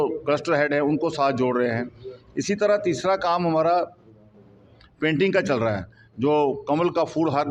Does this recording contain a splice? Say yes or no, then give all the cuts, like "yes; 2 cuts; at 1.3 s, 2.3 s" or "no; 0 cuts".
no; 0 cuts